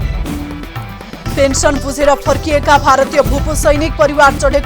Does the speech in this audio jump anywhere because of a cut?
yes; 1 cut; at 1.3 s

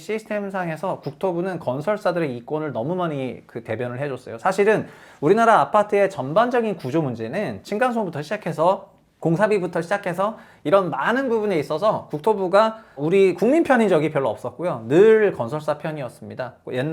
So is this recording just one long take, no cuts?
yes; 0 cuts

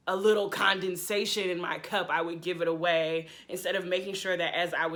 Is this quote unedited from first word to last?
yes; 0 cuts

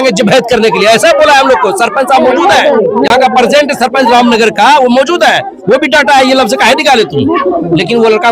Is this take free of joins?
yes; 0 cuts

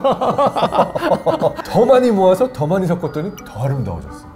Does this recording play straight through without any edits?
no; 1 cut; at 1.6 s

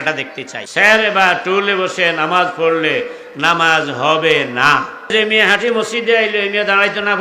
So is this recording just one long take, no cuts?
no; 1 cut; at 5.1 s

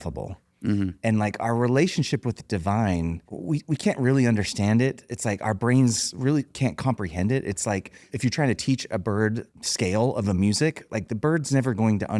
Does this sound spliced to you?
yes; 3 cuts; at 3.3 s, 8.1 s, 9.5 s

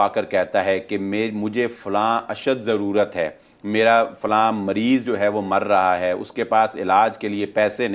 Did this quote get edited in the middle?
no; 0 cuts

